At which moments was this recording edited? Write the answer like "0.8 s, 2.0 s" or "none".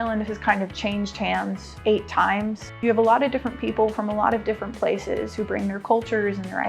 1.7 s, 2.8 s